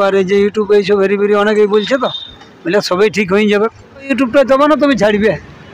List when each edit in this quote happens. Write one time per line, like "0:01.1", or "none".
0:04.1